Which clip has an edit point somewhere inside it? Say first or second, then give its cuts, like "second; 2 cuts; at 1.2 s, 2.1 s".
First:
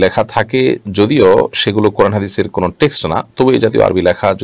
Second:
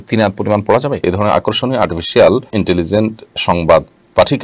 second; 2 cuts; at 1.0 s, 2.5 s